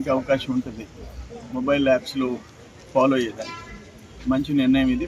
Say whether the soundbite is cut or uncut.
uncut